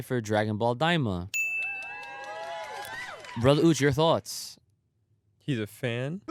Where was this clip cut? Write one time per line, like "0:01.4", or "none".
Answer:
none